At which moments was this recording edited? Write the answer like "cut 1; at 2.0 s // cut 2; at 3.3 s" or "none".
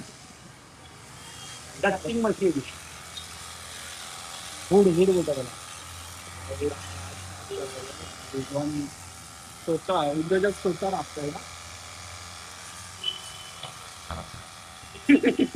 none